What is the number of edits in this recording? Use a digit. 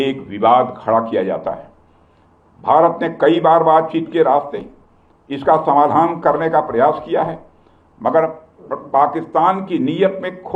0